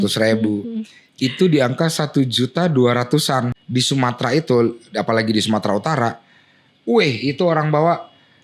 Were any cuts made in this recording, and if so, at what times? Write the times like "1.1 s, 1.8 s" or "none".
3.4 s